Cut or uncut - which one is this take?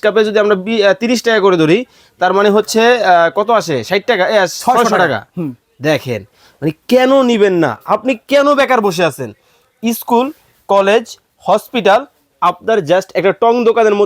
uncut